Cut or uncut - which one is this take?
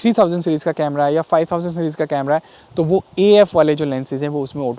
uncut